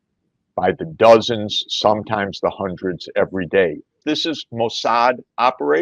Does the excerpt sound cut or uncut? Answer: cut